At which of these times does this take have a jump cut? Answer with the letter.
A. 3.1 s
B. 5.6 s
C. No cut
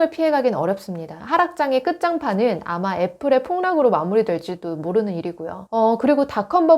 B